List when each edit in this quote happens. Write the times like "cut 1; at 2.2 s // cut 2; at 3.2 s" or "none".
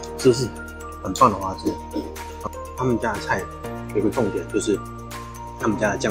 cut 1; at 2.3 s